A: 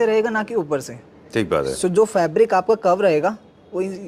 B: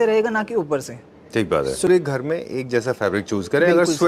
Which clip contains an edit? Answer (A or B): B